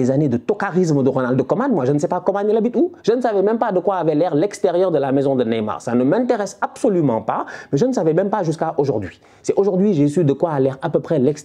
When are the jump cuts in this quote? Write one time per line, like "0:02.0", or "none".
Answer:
none